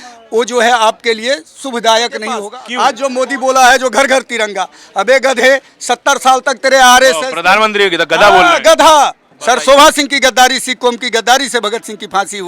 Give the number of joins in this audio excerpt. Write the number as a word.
two